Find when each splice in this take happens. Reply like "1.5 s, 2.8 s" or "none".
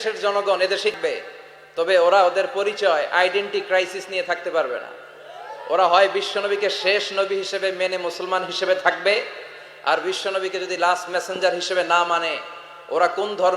1.0 s